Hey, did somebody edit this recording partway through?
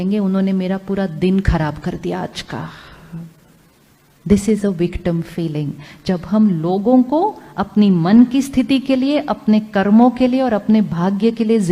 no; 0 cuts

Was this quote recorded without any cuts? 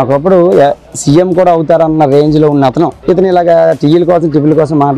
yes; 0 cuts

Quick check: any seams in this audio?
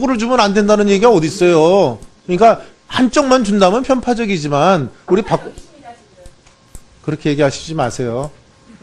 yes; 1 cut; at 3.8 s

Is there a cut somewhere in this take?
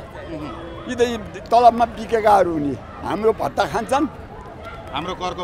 no; 0 cuts

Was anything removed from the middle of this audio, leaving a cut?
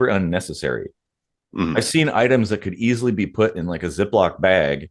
no; 0 cuts

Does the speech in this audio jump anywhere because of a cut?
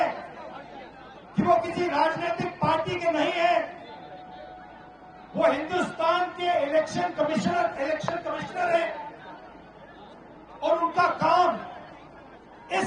no; 0 cuts

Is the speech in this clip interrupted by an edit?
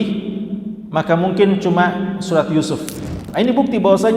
yes; 1 cut; at 3.2 s

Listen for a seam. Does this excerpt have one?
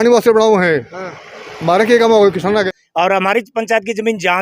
yes; 1 cut; at 2.4 s

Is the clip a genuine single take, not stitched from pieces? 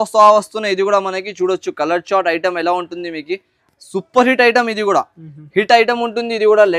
yes; 0 cuts

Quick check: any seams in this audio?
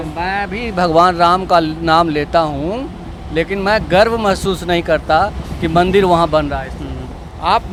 no; 0 cuts

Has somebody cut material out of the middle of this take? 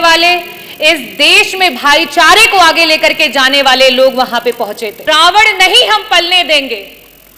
yes; 1 cut; at 5.0 s

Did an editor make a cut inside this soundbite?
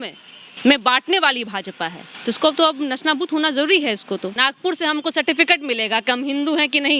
yes; 1 cut; at 4.3 s

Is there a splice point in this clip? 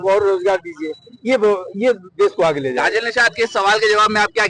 no; 0 cuts

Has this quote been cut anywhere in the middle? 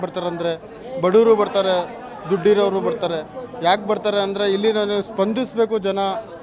no; 0 cuts

